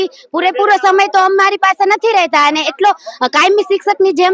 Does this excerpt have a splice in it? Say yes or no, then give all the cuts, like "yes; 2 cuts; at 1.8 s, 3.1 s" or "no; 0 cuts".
no; 0 cuts